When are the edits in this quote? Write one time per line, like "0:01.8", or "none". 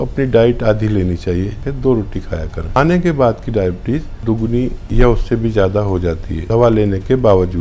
0:01.6
0:02.8
0:04.4
0:06.3